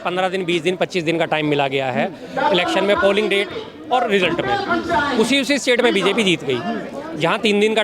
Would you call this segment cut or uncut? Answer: uncut